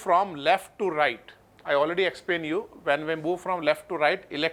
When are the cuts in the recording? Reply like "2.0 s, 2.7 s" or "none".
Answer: none